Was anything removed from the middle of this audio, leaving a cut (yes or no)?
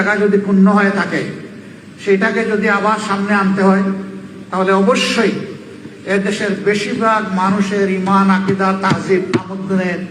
no